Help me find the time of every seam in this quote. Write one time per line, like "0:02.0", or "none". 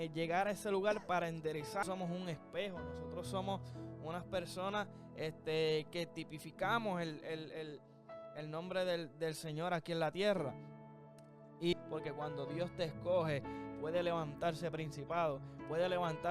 0:01.8
0:11.7